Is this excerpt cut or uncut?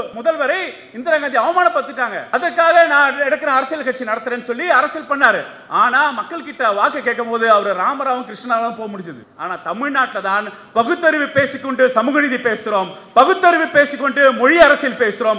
cut